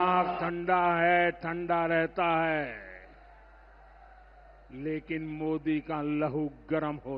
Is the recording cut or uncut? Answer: uncut